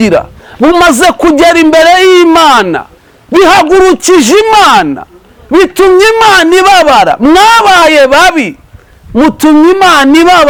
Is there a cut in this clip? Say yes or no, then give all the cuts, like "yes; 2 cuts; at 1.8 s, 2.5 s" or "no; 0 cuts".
no; 0 cuts